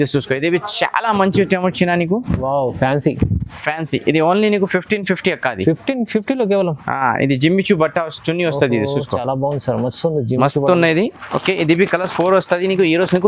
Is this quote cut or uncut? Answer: uncut